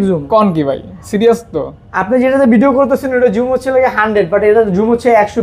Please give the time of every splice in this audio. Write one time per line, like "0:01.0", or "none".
none